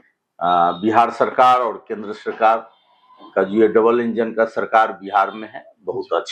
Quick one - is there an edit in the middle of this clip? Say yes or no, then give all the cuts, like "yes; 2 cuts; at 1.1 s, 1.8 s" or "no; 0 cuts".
no; 0 cuts